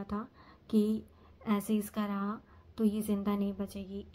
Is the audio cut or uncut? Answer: uncut